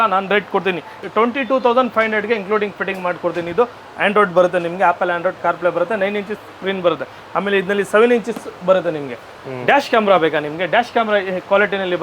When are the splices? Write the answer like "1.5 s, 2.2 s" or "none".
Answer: none